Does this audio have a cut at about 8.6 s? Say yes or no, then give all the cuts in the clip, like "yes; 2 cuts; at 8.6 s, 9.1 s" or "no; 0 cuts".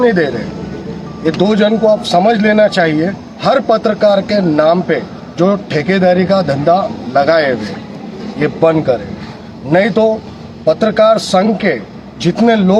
no; 1 cut; at 3.2 s